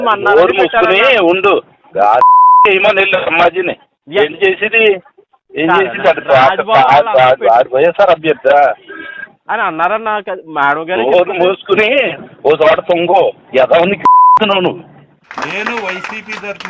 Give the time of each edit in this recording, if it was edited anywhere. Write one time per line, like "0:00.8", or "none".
0:15.3